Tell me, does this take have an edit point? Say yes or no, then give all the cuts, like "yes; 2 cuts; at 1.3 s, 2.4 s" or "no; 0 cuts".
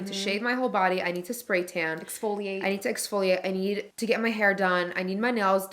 yes; 1 cut; at 3.9 s